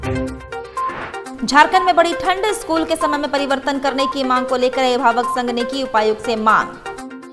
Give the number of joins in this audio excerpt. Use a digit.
1